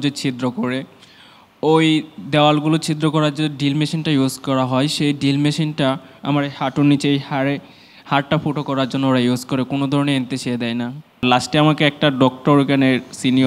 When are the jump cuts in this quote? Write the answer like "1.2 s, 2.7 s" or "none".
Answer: 11.2 s